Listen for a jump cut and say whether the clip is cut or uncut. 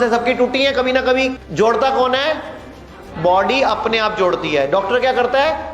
cut